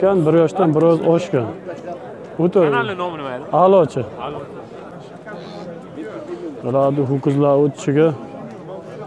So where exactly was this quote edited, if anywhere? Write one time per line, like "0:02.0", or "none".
0:04.9